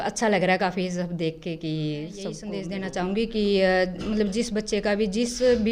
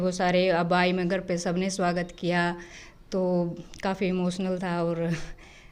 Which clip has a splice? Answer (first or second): first